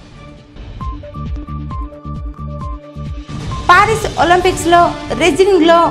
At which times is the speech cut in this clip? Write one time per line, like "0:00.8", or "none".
0:01.1